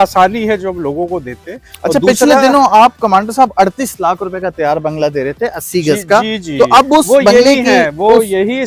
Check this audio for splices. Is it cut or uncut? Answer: uncut